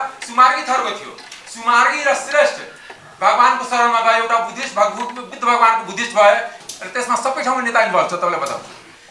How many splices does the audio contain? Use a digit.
1